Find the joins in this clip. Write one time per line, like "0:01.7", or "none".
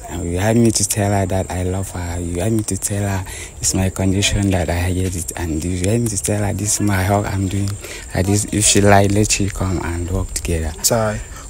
none